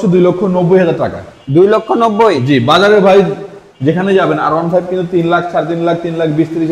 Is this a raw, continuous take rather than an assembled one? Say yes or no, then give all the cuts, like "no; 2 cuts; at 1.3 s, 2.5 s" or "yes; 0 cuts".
yes; 0 cuts